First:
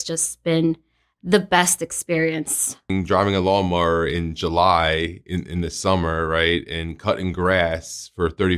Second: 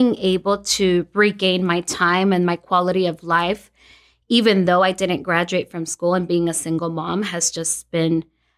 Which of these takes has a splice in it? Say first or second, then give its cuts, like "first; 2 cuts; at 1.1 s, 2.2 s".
first; 1 cut; at 2.9 s